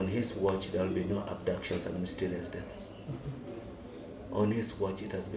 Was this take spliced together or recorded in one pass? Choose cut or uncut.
uncut